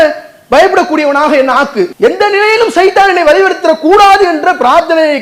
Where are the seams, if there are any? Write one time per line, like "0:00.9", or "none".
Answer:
0:01.9